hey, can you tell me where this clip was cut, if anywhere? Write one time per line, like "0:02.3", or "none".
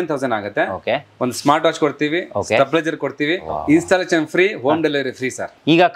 0:03.4